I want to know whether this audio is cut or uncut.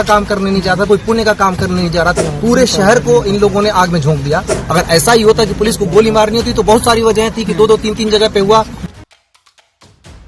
cut